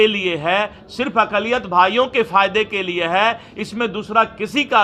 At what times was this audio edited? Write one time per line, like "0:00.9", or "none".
none